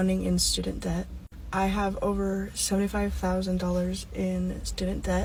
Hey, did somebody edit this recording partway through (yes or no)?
no